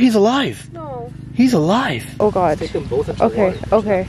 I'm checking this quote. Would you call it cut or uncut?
cut